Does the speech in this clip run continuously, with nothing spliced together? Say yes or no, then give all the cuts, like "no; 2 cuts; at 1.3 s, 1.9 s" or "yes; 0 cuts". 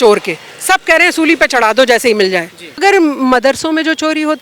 no; 1 cut; at 2.8 s